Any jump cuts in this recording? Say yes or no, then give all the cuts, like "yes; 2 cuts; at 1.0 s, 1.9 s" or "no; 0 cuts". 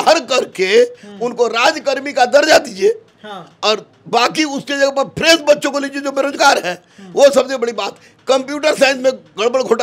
no; 0 cuts